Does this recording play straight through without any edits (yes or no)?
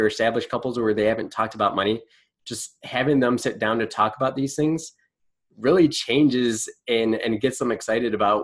yes